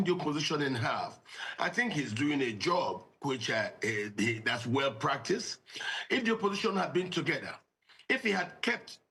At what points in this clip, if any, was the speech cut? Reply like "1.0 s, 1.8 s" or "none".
none